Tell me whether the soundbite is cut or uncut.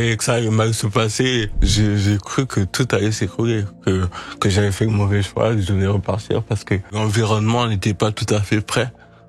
cut